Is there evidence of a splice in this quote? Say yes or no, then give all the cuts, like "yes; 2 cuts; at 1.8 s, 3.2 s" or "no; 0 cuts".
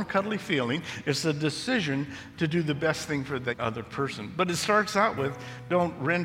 yes; 1 cut; at 3.6 s